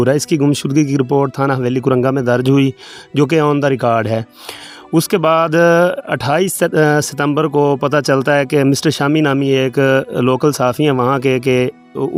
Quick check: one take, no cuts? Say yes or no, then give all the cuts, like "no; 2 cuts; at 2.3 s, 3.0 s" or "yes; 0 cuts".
yes; 0 cuts